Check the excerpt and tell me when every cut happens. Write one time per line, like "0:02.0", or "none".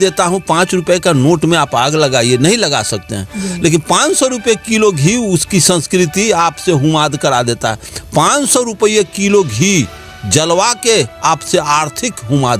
0:07.9

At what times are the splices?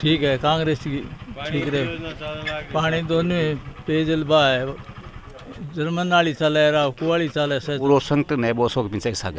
0:07.8

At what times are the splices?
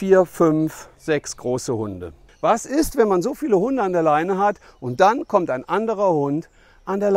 0:02.3

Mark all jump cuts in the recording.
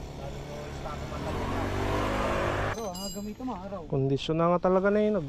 0:02.7

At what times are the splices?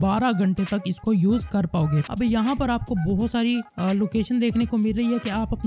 0:02.1

